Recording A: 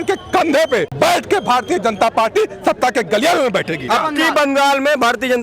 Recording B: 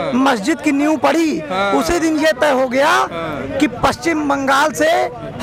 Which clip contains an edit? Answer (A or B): A